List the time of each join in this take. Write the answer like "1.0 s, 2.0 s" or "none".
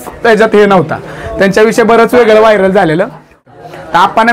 3.4 s